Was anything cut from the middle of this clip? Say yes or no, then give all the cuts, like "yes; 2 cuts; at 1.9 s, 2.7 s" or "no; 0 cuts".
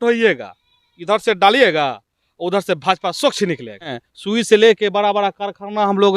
yes; 1 cut; at 4.0 s